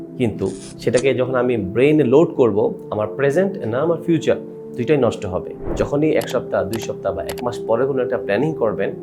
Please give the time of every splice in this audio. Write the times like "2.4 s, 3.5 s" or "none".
5.6 s